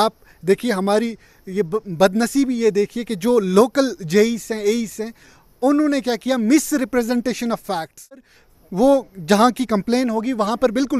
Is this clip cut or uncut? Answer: cut